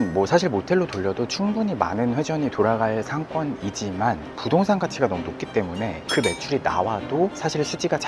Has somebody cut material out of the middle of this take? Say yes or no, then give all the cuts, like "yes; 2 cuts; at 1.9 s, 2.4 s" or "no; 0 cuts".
no; 0 cuts